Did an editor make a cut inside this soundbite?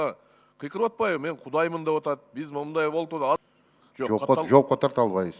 yes; 1 cut; at 3.4 s

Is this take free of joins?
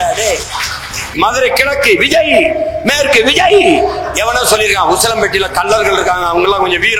no; 1 cut; at 1.1 s

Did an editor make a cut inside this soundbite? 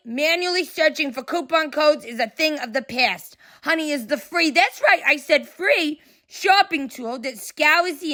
no; 0 cuts

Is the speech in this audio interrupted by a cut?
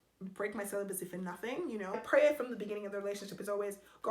yes; 1 cut; at 2.0 s

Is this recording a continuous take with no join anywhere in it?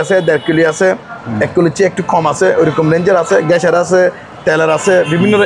yes; 0 cuts

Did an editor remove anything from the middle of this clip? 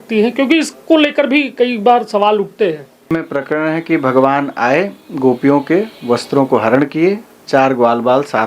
yes; 1 cut; at 3.2 s

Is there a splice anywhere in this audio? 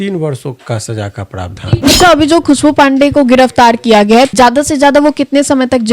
yes; 2 cuts; at 1.8 s, 4.3 s

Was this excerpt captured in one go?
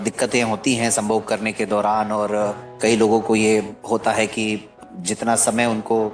yes; 0 cuts

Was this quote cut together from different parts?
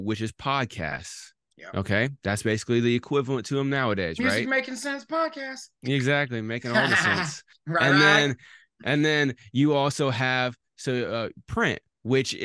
no; 0 cuts

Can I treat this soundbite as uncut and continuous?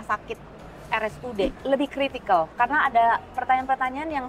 no; 1 cut; at 1.6 s

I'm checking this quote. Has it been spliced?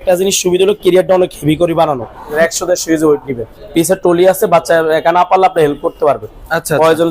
yes; 2 cuts; at 2.3 s, 3.5 s

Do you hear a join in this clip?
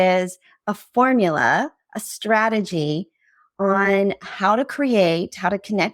no; 0 cuts

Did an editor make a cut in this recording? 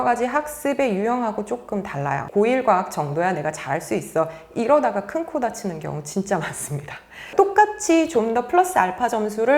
yes; 2 cuts; at 2.2 s, 7.3 s

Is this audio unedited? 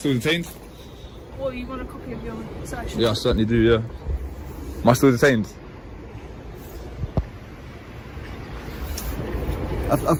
yes; 0 cuts

